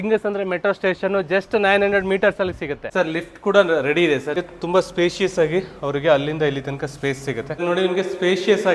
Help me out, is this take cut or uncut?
cut